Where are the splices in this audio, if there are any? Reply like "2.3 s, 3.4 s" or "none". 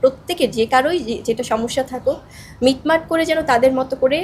none